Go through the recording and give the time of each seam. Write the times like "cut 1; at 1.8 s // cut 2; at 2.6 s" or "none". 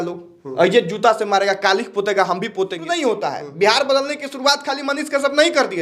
cut 1; at 2.8 s